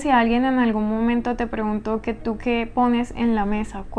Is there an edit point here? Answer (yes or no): no